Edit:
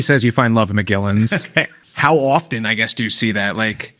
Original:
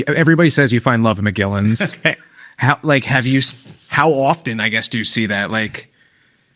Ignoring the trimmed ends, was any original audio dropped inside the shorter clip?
yes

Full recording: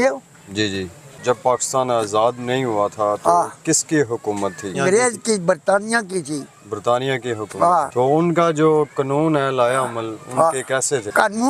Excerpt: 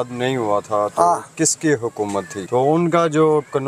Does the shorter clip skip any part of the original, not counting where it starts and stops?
yes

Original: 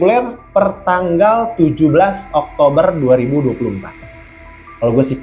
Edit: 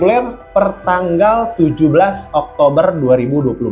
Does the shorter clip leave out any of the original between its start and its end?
no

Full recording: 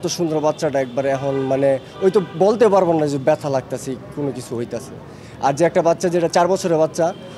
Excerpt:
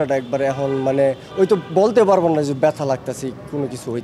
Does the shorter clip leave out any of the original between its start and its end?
no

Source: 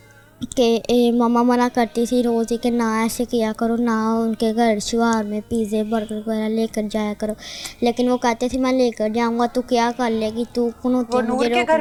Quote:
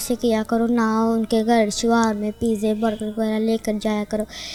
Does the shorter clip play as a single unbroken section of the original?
yes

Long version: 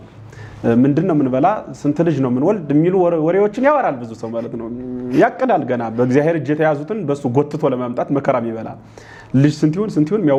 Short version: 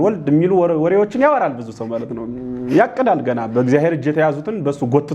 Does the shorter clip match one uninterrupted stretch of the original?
yes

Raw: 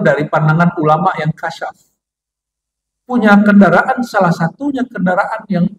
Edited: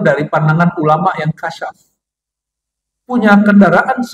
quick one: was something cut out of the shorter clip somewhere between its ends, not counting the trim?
no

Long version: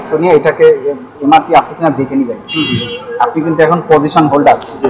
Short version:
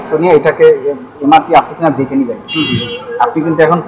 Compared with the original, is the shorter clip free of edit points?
yes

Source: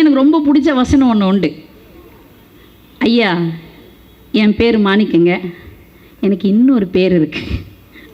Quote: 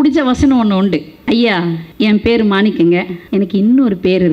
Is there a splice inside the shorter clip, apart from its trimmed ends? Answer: yes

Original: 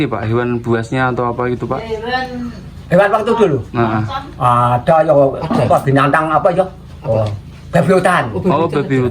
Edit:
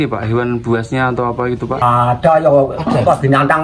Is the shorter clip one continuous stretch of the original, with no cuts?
no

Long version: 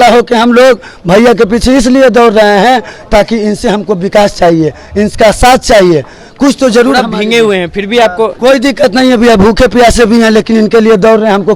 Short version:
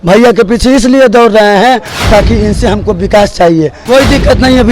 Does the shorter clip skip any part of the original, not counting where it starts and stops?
yes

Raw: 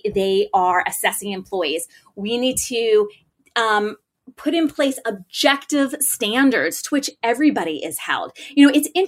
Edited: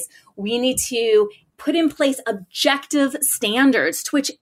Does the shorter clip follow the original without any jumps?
no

